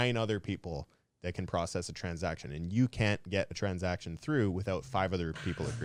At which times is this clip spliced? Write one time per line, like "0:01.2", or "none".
none